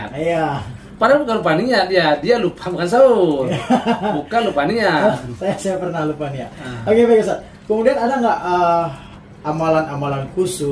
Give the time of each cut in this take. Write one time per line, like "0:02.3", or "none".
none